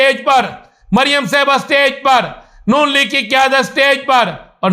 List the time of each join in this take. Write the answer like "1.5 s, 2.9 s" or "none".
none